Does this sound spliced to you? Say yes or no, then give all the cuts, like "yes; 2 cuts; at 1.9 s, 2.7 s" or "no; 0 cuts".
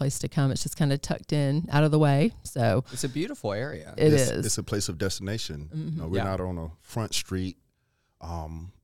no; 0 cuts